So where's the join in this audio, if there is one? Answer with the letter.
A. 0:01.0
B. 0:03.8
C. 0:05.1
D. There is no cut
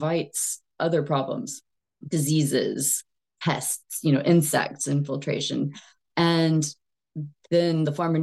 D